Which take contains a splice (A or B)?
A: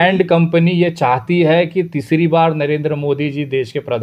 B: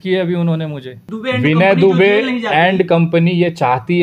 B